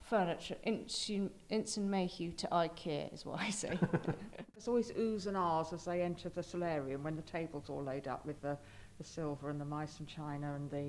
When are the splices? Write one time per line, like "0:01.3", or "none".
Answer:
0:04.5

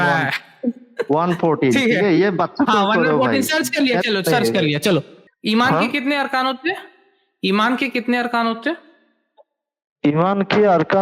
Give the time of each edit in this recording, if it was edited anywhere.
0:05.2

